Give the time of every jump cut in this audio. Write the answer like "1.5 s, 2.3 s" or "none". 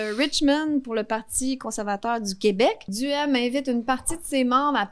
2.9 s